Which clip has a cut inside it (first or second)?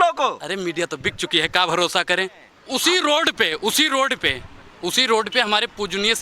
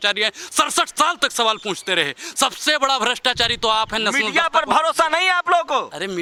first